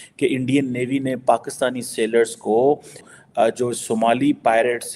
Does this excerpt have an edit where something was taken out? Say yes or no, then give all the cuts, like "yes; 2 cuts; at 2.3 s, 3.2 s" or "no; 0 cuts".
yes; 1 cut; at 3.0 s